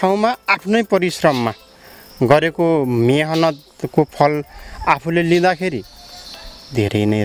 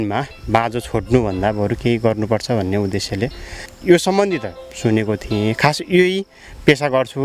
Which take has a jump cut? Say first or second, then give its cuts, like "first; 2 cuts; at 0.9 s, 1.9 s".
second; 1 cut; at 3.6 s